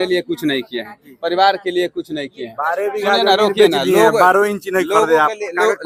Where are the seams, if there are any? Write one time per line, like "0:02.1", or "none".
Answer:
none